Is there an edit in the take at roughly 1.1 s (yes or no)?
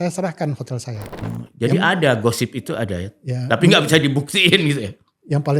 yes